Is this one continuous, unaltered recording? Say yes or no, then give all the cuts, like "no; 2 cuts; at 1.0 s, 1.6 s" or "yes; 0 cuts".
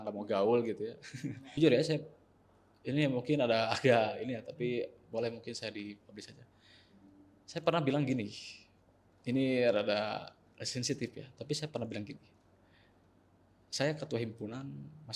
no; 1 cut; at 1.5 s